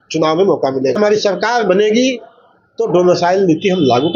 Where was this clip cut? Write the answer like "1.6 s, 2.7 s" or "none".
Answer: 1.0 s